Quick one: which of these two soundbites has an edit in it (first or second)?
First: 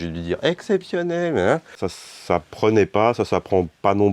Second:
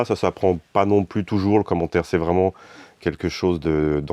first